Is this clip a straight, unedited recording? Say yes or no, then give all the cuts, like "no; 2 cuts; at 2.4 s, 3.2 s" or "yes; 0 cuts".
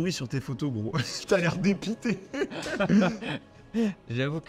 yes; 0 cuts